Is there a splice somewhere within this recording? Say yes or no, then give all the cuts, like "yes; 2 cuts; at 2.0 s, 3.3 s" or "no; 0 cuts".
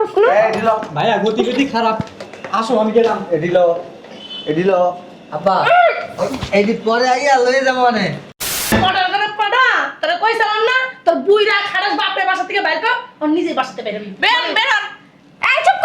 yes; 1 cut; at 8.7 s